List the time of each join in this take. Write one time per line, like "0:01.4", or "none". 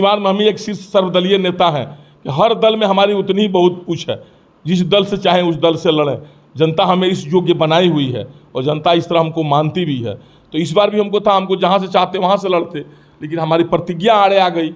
none